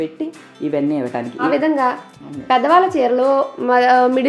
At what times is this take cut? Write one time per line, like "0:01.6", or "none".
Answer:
0:01.5